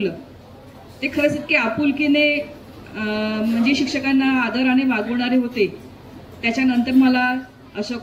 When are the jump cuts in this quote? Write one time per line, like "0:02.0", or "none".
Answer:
none